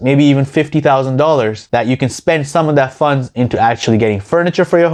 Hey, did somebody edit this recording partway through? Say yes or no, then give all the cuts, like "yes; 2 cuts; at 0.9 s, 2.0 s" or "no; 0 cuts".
no; 0 cuts